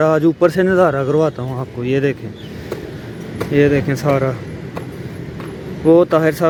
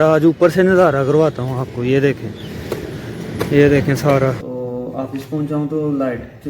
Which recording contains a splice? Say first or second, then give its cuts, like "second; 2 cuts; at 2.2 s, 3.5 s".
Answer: second; 1 cut; at 4.4 s